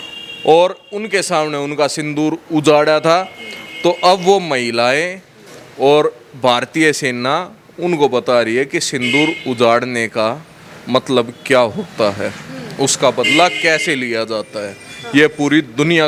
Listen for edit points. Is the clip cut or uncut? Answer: uncut